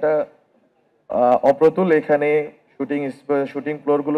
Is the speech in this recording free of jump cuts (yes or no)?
yes